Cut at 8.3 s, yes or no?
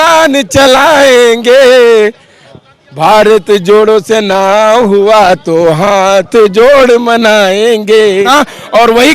yes